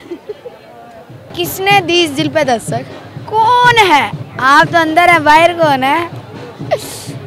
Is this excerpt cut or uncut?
cut